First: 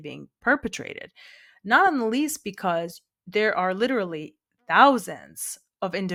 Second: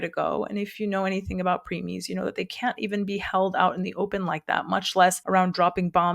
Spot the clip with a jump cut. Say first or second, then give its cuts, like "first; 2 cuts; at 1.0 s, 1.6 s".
second; 1 cut; at 5.2 s